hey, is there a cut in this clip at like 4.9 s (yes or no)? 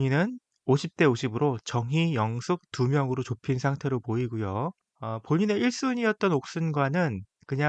yes